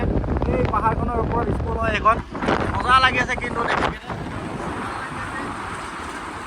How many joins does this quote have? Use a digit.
0